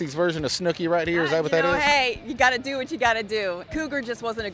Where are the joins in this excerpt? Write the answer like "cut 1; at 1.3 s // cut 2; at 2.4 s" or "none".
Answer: cut 1; at 3.6 s